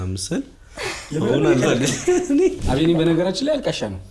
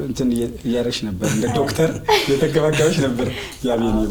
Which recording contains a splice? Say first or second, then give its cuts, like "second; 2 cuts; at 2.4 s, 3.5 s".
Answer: first; 1 cut; at 2.6 s